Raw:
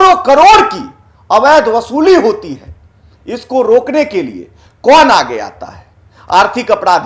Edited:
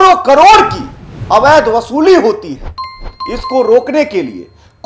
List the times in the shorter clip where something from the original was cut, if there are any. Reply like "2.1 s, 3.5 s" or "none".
none